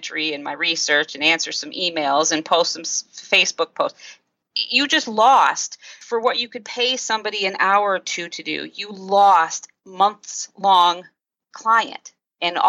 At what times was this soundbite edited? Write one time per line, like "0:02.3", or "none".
0:06.0
0:09.8